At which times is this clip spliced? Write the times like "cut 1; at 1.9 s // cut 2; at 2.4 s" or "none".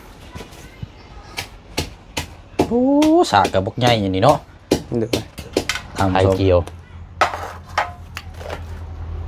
cut 1; at 6.3 s